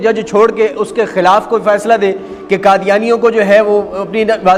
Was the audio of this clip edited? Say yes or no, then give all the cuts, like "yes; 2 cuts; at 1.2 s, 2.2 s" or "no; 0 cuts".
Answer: no; 0 cuts